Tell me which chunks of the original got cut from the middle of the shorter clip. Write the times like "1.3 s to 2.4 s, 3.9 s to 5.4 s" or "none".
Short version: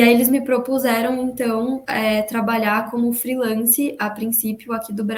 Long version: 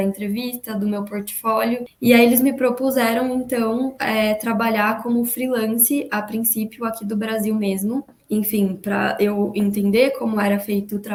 none